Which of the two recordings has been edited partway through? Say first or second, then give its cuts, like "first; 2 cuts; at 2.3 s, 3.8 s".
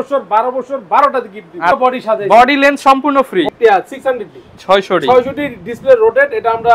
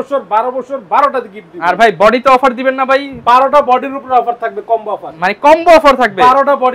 first; 2 cuts; at 1.8 s, 3.5 s